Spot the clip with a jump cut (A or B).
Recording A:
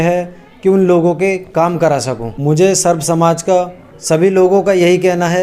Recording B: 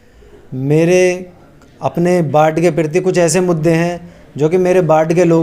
A